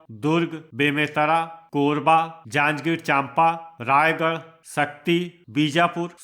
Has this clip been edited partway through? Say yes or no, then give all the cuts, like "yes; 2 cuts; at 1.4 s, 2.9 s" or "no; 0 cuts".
yes; 5 cuts; at 1.6 s, 2.4 s, 3.7 s, 4.5 s, 5.4 s